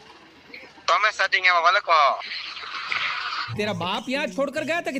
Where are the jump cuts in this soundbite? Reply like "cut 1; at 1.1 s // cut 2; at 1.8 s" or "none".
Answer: none